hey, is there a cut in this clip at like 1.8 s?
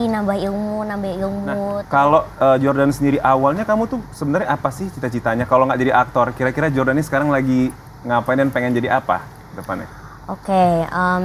yes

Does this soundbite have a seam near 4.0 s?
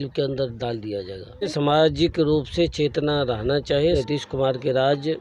yes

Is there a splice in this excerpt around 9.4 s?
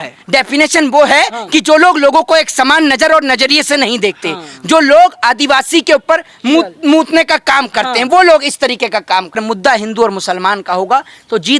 yes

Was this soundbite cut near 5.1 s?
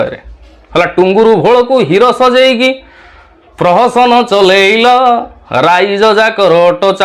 no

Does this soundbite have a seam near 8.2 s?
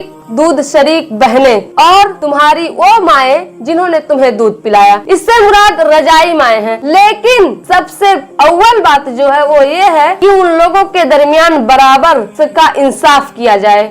no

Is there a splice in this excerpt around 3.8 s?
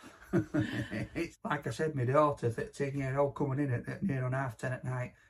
no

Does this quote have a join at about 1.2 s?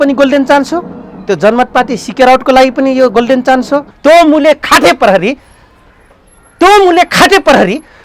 no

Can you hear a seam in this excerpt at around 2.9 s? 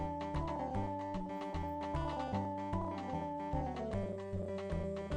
yes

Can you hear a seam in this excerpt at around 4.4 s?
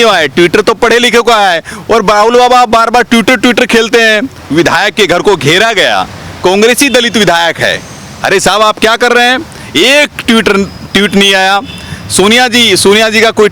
yes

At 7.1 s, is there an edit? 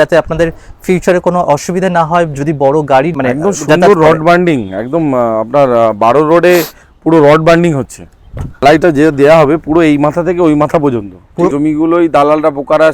no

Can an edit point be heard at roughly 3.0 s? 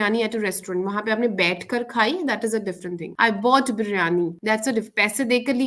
yes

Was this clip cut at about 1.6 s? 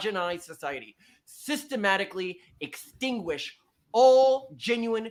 no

